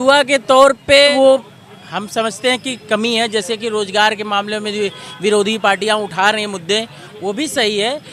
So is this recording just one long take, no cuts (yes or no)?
no